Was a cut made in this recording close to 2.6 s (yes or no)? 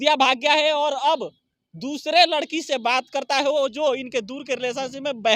no